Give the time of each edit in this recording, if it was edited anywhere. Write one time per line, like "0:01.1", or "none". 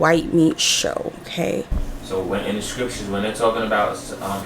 0:01.8